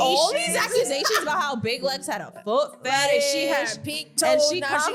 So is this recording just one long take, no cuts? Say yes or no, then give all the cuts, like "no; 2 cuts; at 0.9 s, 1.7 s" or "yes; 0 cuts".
yes; 0 cuts